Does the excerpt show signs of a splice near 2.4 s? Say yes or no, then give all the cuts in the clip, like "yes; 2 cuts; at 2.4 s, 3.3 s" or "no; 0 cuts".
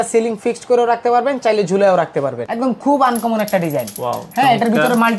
yes; 1 cut; at 2.4 s